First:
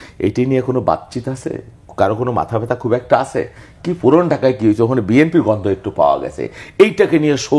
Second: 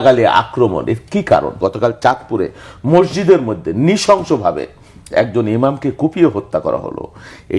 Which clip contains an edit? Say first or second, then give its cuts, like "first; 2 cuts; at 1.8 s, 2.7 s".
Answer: second; 1 cut; at 1.6 s